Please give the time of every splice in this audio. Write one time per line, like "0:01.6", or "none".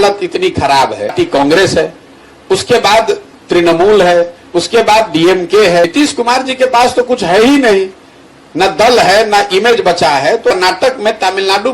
0:01.1
0:05.8
0:10.5

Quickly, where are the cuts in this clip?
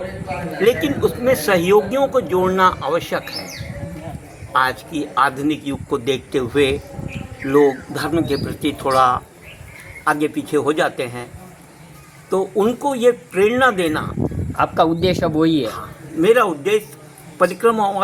none

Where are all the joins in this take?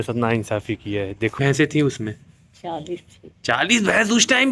0:01.4

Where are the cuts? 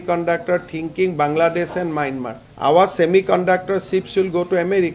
none

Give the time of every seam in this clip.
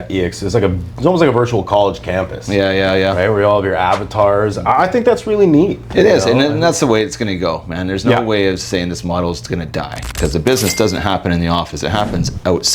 0:10.1

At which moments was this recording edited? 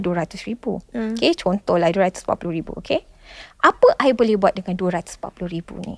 none

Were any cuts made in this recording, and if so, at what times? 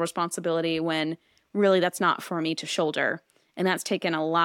none

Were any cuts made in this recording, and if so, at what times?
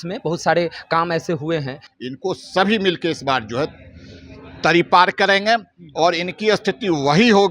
0:01.8

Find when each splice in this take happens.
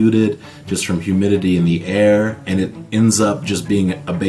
none

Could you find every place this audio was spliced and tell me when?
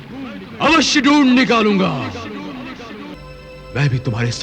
0:03.2

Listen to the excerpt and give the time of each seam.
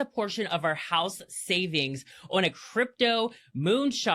none

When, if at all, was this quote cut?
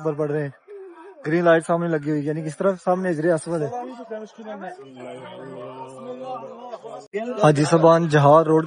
0:07.0

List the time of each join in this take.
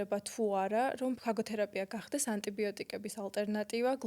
0:01.2

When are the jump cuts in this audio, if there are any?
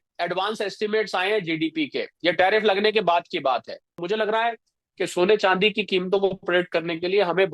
0:03.9

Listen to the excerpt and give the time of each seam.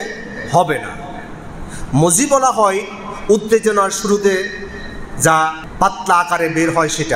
0:05.6

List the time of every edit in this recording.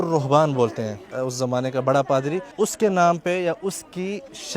0:01.1
0:02.5

